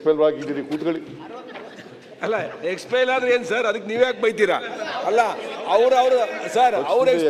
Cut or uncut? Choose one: uncut